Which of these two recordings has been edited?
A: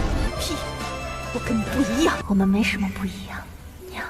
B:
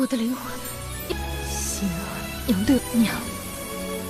A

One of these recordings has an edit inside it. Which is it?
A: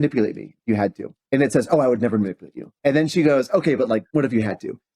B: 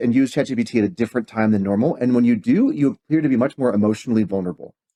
A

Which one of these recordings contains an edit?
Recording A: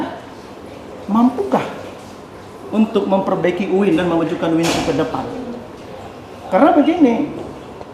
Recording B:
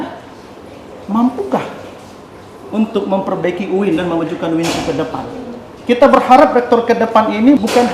B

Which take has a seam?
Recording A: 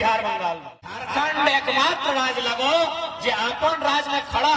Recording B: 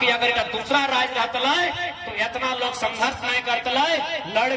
A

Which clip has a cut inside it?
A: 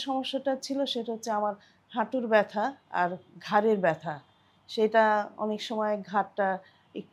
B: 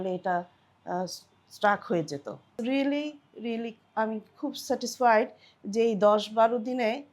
B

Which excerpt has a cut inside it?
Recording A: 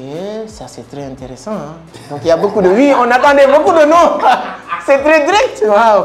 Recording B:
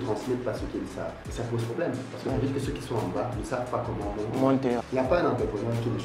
B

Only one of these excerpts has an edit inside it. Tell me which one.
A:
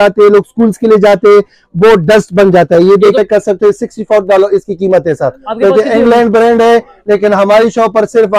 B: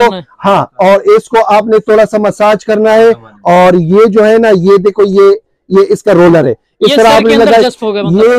A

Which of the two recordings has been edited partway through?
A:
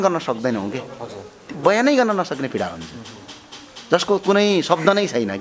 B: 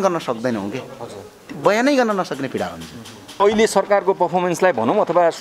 B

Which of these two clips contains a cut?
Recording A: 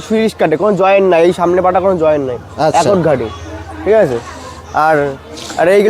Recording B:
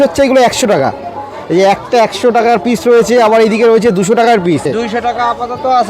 B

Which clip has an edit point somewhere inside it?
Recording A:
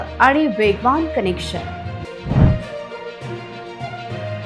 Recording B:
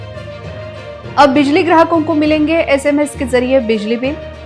B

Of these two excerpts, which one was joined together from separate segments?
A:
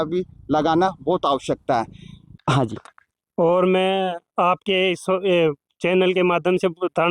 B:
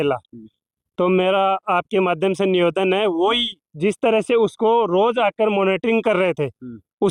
A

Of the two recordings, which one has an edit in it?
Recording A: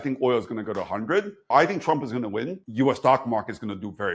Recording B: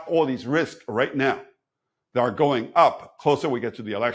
A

